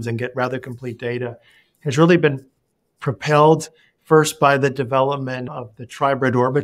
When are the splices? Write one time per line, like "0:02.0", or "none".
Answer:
0:05.6